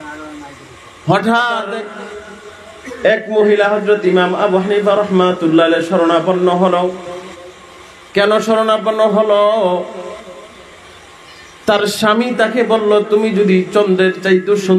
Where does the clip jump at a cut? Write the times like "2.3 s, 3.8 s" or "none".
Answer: 1.7 s